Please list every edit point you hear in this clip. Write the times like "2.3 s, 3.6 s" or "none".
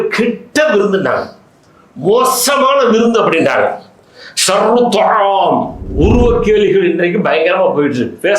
5.8 s